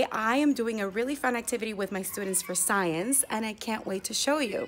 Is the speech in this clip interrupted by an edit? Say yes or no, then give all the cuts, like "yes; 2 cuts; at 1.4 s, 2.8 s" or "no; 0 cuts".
no; 0 cuts